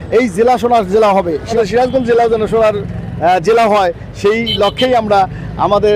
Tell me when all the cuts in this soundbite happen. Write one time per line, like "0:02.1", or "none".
0:01.5